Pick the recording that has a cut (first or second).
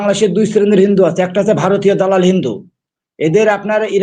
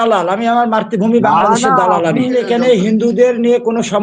second